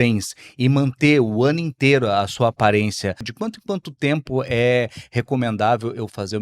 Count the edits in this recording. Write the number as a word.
one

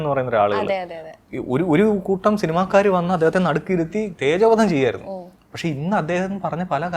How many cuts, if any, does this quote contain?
zero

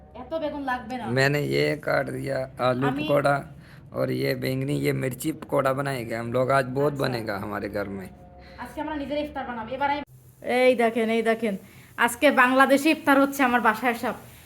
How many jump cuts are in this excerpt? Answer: one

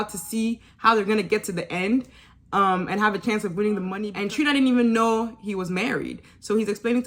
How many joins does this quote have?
one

